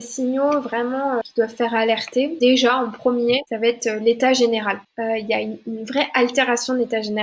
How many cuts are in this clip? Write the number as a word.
four